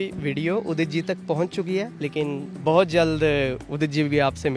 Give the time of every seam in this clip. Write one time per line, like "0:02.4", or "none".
0:01.9